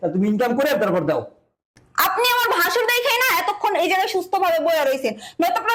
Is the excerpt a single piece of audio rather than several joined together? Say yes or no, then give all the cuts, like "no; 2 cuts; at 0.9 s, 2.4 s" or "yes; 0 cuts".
no; 1 cut; at 1.8 s